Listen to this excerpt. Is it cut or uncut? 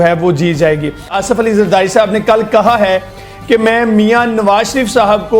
cut